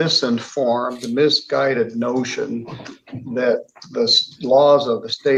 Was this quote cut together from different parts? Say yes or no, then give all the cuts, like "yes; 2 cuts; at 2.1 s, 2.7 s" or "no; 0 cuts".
no; 0 cuts